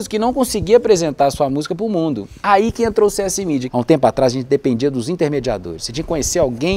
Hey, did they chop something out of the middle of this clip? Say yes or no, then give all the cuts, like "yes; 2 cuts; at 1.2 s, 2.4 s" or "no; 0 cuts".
yes; 1 cut; at 3.7 s